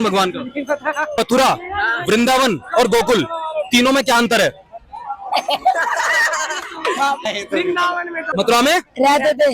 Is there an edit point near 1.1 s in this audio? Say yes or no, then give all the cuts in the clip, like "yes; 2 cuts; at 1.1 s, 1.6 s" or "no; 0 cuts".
yes; 3 cuts; at 1.1 s, 7.2 s, 8.3 s